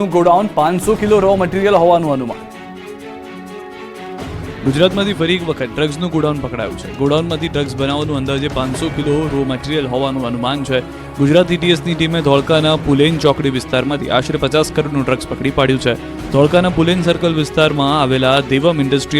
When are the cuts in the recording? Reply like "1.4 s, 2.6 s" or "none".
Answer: 8.9 s